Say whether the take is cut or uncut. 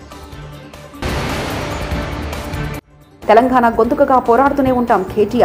cut